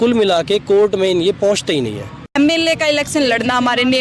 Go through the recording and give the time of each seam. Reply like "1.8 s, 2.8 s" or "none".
2.2 s